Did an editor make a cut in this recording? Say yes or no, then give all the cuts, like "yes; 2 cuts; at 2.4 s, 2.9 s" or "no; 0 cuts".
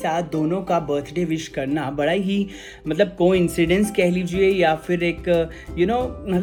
no; 0 cuts